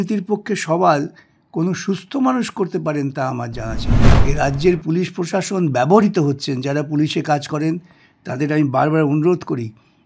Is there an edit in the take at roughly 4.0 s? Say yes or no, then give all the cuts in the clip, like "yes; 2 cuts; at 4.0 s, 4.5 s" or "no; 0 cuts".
yes; 1 cut; at 4.0 s